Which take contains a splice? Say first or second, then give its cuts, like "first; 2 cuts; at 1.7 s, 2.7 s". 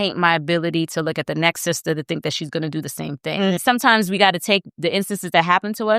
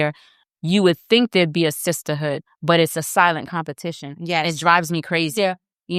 first; 1 cut; at 3.6 s